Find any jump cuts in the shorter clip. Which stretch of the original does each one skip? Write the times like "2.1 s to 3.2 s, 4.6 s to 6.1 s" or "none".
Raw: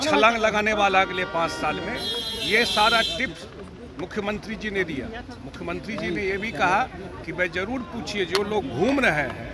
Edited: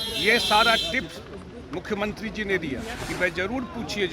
5.3 s to 7.2 s